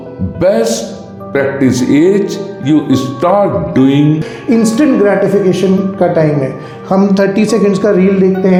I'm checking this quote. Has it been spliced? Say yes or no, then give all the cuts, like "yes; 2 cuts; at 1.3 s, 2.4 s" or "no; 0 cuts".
no; 0 cuts